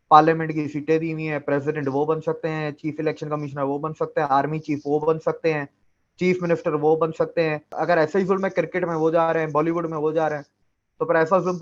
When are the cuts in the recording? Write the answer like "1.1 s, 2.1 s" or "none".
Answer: 7.7 s